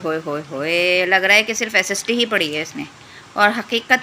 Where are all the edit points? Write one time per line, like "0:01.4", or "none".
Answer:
none

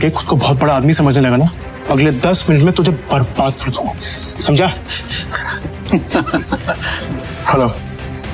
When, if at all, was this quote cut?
0:01.7
0:06.9

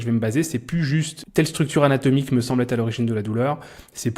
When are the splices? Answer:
0:01.2

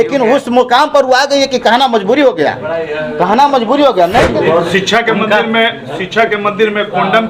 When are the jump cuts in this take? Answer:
0:04.3

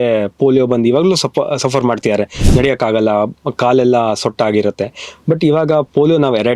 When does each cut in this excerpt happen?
none

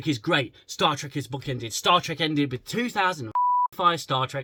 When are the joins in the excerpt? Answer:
none

